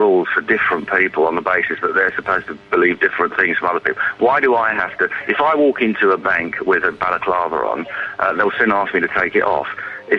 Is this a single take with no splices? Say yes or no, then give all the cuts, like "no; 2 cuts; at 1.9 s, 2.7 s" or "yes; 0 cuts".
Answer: yes; 0 cuts